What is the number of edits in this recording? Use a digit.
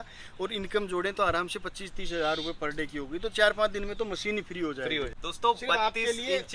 1